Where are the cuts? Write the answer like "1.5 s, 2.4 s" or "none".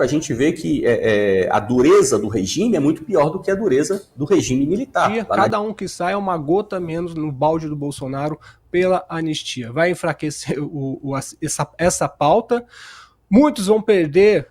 5.2 s